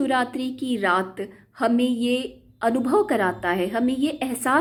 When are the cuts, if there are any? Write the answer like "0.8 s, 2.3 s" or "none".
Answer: none

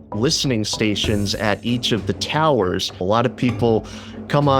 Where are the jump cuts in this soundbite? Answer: 3.0 s

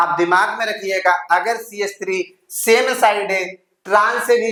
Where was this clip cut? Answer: none

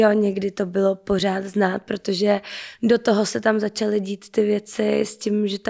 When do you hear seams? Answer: none

